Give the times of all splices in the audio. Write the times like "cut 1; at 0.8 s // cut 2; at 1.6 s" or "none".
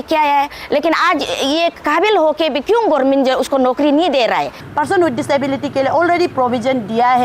cut 1; at 4.6 s